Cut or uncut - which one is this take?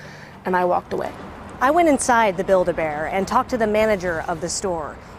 uncut